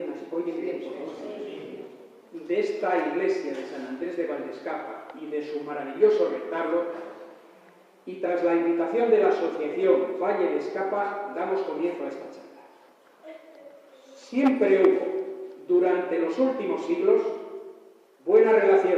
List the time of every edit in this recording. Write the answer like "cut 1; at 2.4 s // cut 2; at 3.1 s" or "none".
cut 1; at 8.1 s